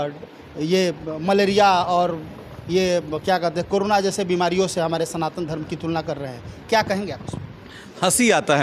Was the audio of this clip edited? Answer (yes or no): no